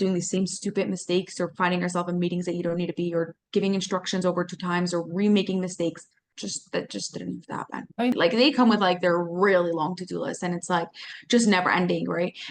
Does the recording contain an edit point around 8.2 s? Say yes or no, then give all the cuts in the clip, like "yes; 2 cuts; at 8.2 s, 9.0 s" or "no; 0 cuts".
yes; 1 cut; at 8.2 s